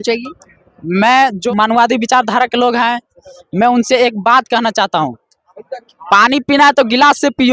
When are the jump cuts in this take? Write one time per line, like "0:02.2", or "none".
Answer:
0:01.4

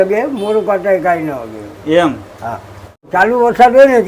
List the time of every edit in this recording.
0:03.0

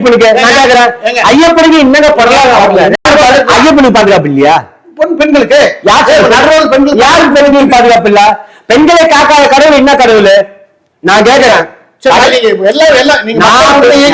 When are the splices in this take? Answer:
0:03.0
0:12.2

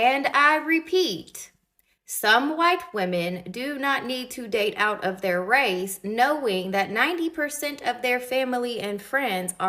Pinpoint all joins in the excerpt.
none

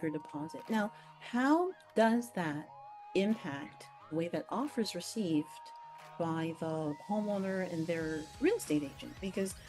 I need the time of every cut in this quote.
0:04.1

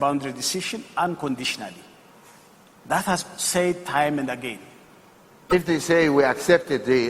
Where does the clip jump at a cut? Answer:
0:05.5

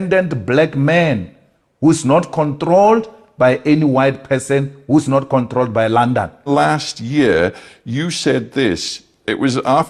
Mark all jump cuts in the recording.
none

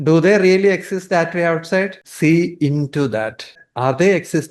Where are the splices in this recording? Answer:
0:02.0
0:03.6

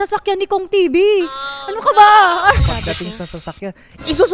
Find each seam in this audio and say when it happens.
0:02.7

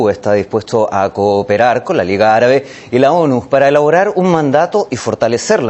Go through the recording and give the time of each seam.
0:02.3

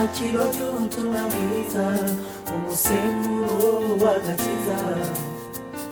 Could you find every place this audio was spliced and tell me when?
none

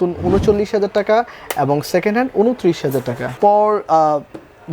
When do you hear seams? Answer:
0:03.4

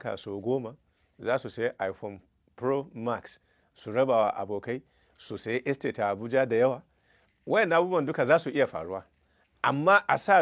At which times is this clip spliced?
none

